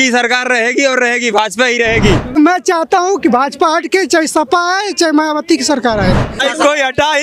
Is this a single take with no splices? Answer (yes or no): no